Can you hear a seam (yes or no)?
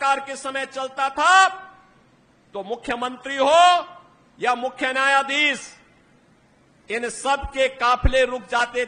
no